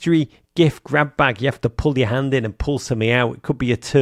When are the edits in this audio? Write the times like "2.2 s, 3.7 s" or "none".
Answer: none